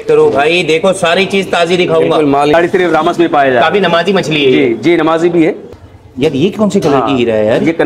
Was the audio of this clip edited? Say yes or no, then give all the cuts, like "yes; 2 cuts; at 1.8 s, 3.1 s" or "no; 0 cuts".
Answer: yes; 2 cuts; at 2.5 s, 5.7 s